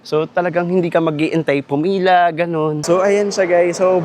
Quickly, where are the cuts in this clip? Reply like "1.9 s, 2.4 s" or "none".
2.8 s